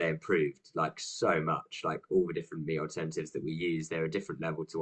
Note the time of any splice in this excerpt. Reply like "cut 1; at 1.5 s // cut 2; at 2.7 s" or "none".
none